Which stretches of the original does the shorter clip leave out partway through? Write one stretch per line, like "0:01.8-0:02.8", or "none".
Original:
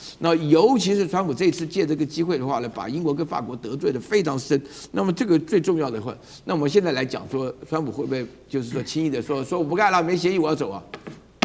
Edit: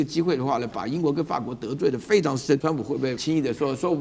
0:04.9-0:08.6